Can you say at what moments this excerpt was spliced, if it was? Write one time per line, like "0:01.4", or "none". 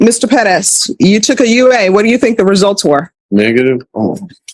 0:03.2